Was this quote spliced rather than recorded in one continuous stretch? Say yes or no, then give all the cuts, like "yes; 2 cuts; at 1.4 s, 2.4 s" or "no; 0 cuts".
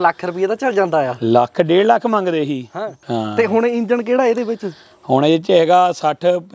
yes; 1 cut; at 2.9 s